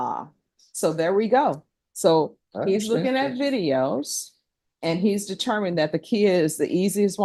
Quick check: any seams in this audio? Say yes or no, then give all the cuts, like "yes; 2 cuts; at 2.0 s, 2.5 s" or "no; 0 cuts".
no; 0 cuts